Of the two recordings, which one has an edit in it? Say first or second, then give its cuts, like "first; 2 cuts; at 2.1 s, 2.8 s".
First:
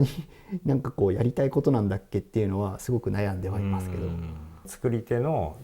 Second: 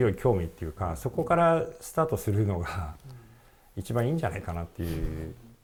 first; 1 cut; at 4.7 s